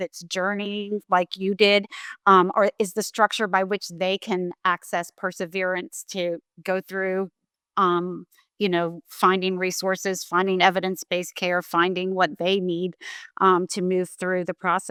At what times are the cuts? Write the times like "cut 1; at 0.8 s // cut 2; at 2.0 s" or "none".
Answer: none